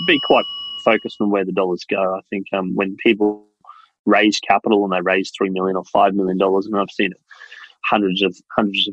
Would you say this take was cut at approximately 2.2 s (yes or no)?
no